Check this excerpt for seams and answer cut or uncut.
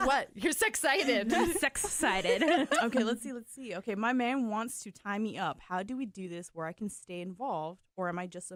uncut